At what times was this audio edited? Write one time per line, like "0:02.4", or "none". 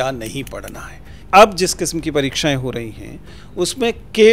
0:01.2

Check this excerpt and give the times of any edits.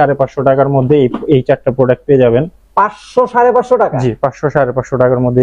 none

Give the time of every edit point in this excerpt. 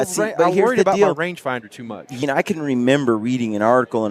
0:02.2

